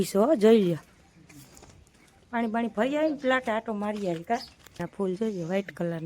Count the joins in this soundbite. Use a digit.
1